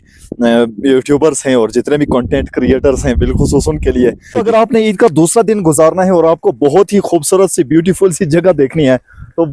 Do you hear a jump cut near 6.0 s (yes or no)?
no